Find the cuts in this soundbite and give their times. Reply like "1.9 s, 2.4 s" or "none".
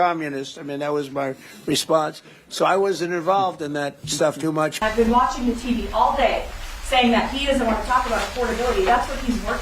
4.8 s